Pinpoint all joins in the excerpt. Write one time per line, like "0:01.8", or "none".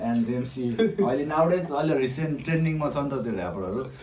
none